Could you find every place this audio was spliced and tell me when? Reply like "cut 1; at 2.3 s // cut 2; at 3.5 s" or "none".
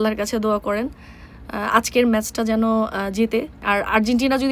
cut 1; at 3.6 s